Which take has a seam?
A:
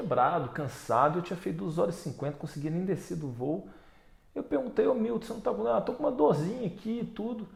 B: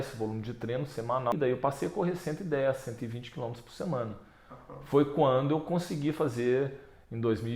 B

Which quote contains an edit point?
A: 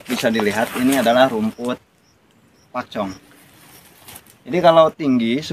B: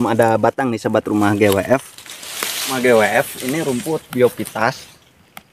B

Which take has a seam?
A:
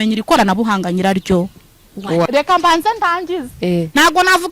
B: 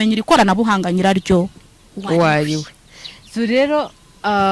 A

